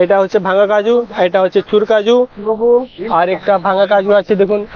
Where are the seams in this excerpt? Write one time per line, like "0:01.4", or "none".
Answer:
none